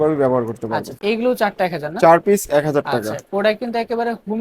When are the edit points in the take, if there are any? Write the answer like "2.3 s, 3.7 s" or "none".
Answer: 1.0 s